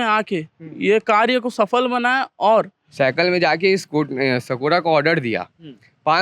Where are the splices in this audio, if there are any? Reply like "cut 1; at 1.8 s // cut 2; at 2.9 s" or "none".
cut 1; at 2.8 s